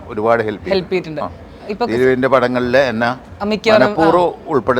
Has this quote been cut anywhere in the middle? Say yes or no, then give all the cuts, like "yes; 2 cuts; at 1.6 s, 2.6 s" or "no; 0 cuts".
no; 0 cuts